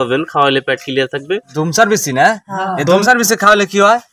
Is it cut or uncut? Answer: cut